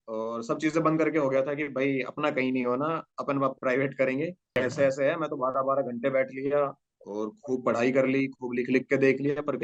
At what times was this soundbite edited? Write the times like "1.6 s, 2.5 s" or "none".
4.6 s